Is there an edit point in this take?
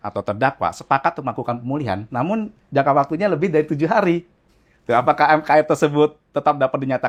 no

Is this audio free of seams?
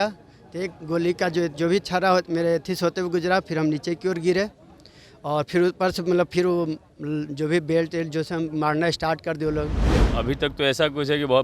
no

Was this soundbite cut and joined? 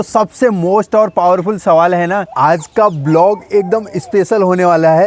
yes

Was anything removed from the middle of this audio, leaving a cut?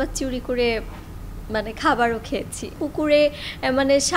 yes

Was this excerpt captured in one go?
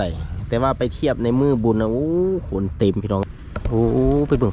no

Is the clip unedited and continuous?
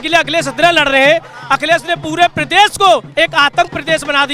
yes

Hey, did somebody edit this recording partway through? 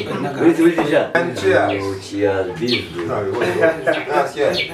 yes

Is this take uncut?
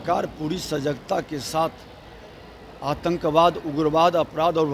yes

